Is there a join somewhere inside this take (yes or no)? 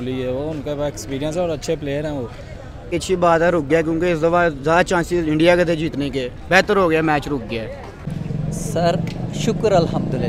yes